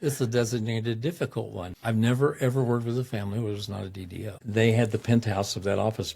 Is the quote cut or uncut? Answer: cut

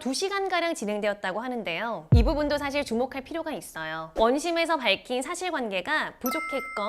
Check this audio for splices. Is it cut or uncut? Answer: cut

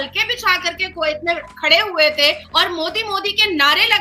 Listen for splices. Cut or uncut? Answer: cut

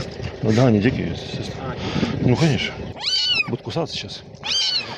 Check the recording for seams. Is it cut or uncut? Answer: cut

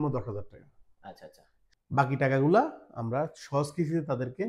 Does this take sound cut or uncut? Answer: cut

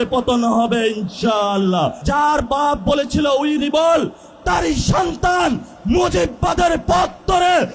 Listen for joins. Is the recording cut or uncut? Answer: cut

